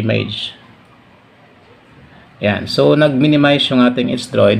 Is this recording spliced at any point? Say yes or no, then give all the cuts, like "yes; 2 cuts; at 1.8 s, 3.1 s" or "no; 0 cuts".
no; 0 cuts